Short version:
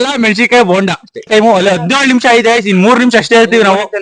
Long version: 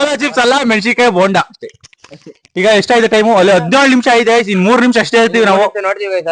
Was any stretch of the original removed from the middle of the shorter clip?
yes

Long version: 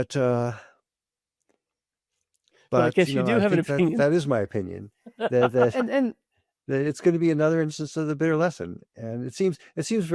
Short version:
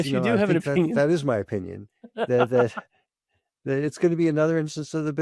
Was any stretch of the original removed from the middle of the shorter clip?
no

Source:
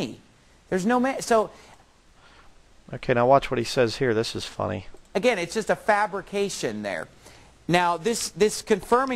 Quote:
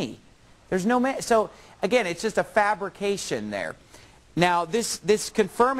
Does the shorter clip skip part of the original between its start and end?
yes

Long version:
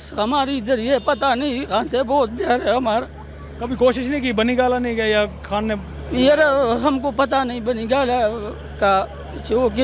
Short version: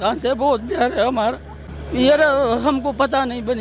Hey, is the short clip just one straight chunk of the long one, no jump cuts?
no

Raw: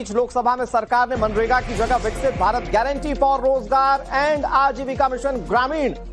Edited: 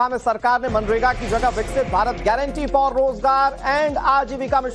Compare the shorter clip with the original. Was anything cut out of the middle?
no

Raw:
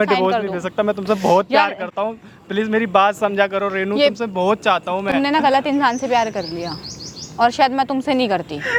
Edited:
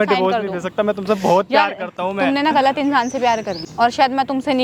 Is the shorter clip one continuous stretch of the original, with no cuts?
no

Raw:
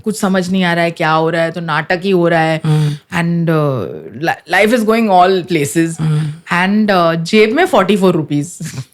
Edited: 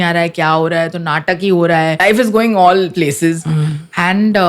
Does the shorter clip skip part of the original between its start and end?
yes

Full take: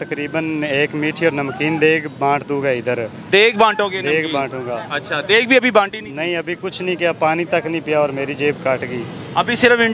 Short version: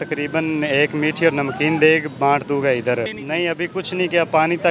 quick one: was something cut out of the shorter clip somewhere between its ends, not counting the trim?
yes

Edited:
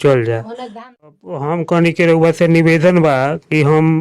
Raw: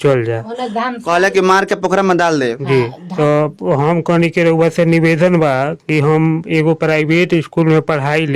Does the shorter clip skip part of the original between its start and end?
yes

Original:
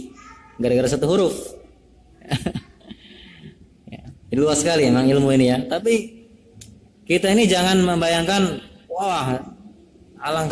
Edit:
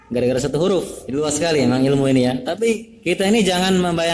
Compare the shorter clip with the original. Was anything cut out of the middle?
yes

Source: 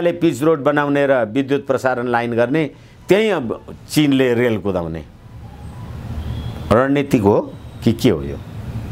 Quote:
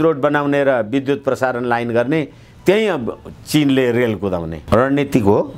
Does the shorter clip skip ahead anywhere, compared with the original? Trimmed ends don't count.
yes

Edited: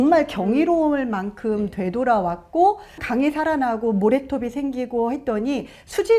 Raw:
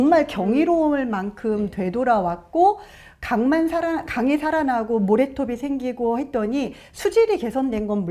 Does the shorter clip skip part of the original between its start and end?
yes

